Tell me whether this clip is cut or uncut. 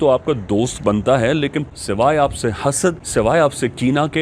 cut